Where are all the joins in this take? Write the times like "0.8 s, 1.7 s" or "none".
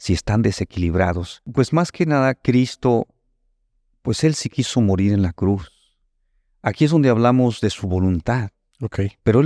1.5 s